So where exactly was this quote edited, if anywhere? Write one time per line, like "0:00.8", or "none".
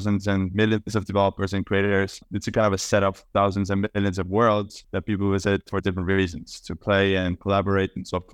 0:02.2